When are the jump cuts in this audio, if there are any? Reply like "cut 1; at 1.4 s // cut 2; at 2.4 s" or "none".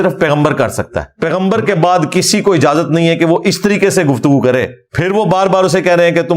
cut 1; at 1.0 s // cut 2; at 4.8 s